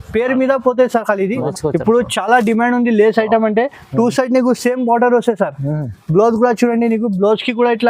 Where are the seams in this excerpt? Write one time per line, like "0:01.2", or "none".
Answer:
0:01.4